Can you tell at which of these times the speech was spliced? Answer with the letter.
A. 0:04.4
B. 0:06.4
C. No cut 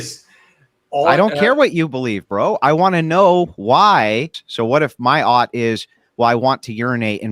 A